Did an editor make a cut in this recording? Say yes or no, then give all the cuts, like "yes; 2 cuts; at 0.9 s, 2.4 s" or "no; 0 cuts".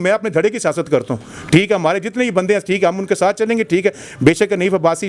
no; 0 cuts